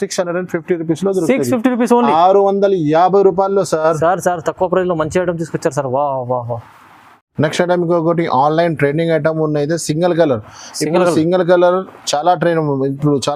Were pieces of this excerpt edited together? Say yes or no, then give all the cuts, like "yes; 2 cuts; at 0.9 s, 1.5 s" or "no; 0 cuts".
no; 0 cuts